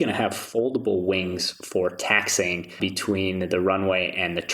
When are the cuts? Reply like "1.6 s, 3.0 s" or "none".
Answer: 2.8 s